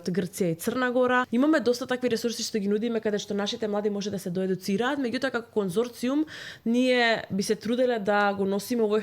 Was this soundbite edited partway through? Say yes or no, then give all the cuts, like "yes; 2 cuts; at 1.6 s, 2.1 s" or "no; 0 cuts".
yes; 1 cut; at 1.3 s